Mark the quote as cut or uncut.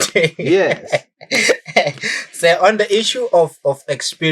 uncut